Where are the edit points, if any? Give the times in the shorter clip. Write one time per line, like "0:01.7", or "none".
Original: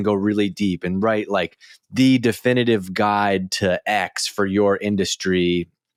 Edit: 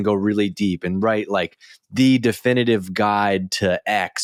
none